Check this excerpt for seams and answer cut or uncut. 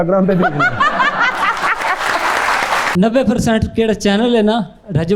cut